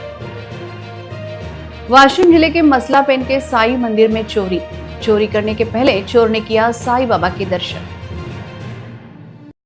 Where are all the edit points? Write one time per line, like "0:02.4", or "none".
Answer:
0:01.4